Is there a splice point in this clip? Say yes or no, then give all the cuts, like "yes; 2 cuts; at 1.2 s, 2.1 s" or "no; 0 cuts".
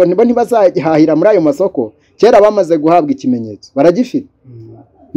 no; 0 cuts